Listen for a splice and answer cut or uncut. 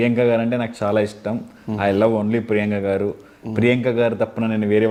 uncut